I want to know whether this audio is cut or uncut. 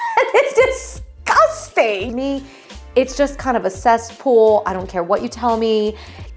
cut